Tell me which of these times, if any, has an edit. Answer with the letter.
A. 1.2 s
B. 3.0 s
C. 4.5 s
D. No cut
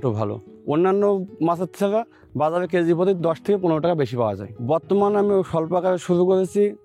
C